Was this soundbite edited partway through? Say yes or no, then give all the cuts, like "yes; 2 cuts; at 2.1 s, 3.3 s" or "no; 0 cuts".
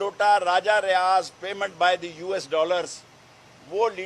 no; 0 cuts